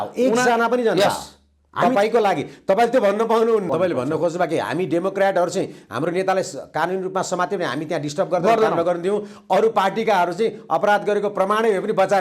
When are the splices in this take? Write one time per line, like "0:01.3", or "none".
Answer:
0:03.7

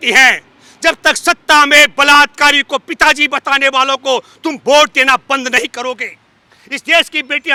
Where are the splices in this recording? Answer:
none

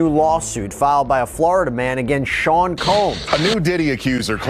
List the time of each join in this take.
0:03.2

